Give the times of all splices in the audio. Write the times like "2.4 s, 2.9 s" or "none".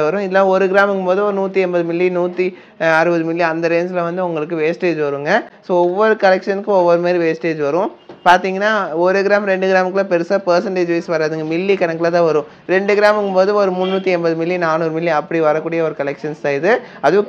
none